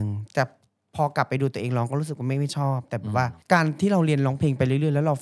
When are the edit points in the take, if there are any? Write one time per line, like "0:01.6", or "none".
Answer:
none

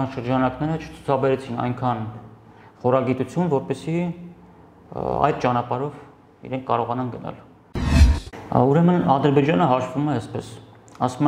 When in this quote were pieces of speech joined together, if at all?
0:08.0

